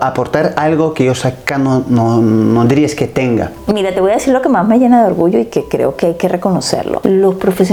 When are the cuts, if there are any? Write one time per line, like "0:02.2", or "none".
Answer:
none